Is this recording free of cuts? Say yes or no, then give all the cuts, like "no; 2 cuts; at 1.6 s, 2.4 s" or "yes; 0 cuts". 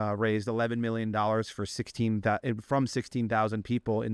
yes; 0 cuts